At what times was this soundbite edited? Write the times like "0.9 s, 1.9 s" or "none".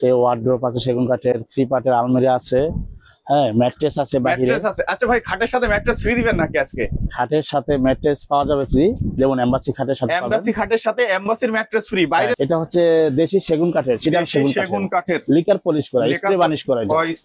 12.4 s